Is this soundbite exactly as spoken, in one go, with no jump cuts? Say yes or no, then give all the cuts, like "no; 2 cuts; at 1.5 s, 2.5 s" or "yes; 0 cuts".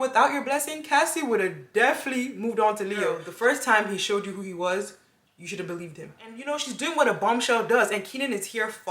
no; 2 cuts; at 3.2 s, 6.3 s